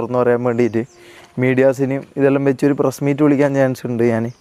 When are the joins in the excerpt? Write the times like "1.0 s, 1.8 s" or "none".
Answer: none